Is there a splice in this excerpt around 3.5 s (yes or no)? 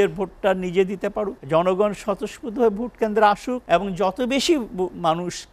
yes